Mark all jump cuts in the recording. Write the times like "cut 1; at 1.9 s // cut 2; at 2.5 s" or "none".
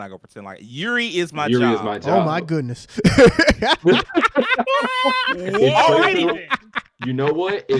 none